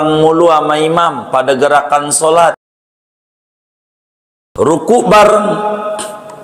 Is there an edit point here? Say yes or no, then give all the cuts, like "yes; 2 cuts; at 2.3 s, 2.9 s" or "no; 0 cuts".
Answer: no; 0 cuts